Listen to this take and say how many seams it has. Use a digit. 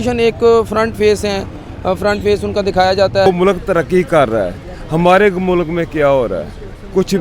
1